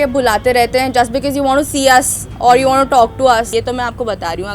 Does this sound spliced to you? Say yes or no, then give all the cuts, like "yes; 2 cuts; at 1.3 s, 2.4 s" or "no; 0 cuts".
yes; 1 cut; at 3.5 s